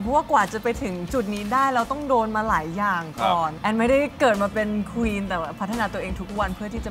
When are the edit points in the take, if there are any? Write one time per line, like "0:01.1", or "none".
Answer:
0:03.5